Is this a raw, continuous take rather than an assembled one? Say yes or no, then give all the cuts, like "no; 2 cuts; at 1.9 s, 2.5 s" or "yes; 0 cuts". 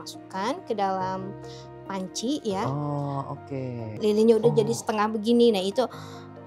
no; 1 cut; at 3.8 s